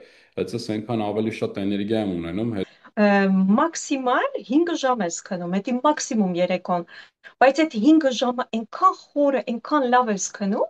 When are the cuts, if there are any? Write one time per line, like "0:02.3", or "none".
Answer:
0:02.6